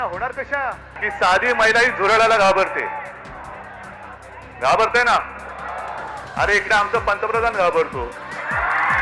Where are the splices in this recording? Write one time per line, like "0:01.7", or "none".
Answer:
0:00.9